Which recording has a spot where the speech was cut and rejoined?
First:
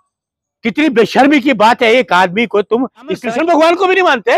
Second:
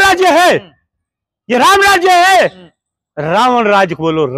first; 1 cut; at 3.2 s

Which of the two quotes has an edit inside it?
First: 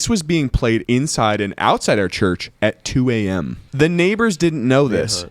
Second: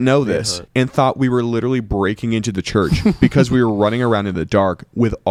first; 3 cuts; at 0.8 s, 2.5 s, 3.6 s

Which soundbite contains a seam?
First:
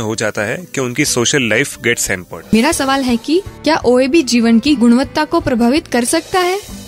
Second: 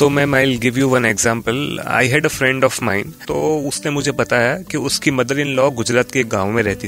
first; 1 cut; at 2.5 s

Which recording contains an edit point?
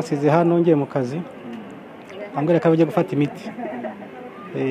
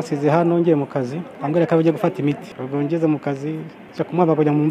second; 3 cuts; at 1.3 s, 2.5 s, 3.8 s

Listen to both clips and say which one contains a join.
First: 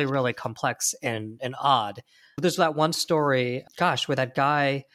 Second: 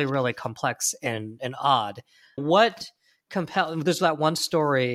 first; 1 cut; at 2.3 s

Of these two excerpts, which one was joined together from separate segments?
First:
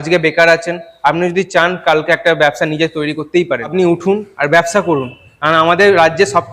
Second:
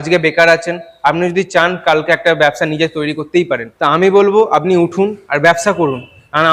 first; 1 cut; at 3.7 s

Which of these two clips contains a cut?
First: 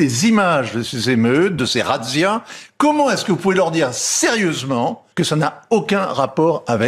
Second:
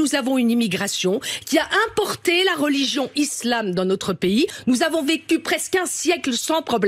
first; 1 cut; at 5.0 s

